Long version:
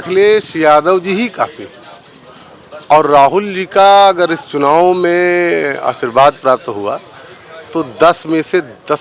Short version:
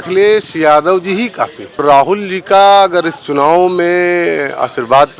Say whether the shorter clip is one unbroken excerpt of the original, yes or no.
no